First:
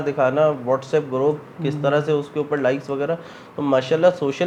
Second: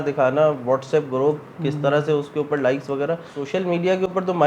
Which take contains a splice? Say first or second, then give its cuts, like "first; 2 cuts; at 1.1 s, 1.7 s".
second; 1 cut; at 3.3 s